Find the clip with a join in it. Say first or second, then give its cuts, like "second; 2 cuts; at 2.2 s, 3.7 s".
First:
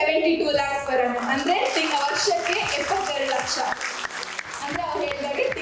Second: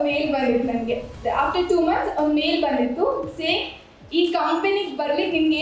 second; 1 cut; at 1.1 s